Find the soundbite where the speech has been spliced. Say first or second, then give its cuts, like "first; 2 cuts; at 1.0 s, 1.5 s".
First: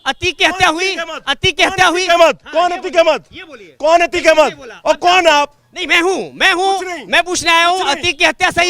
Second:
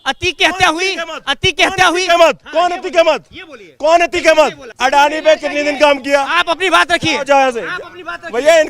second; 1 cut; at 4.7 s